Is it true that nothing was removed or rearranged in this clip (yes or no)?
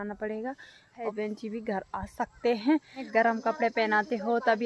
no